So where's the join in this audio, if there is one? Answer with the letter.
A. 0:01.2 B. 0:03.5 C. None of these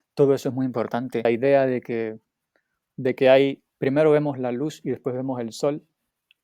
A